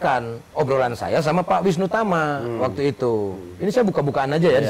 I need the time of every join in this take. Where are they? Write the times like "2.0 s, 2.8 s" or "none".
none